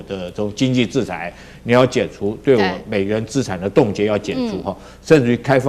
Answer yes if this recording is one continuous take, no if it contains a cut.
yes